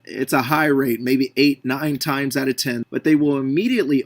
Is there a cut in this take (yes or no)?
yes